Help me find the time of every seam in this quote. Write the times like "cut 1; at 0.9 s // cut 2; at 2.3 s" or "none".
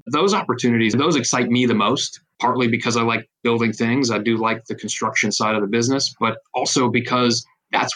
cut 1; at 0.9 s